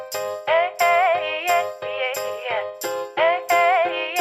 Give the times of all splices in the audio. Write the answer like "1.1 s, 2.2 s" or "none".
2.9 s